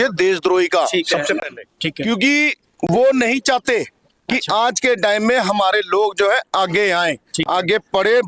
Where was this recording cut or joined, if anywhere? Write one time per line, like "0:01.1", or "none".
none